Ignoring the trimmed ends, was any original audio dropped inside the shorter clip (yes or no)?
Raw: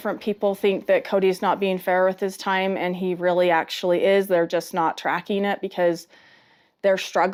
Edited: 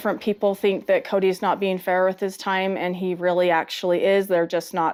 no